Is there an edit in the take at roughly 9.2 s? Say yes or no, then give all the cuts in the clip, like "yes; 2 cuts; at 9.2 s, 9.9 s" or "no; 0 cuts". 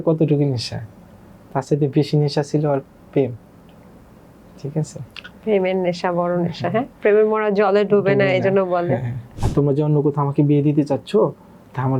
yes; 1 cut; at 9.2 s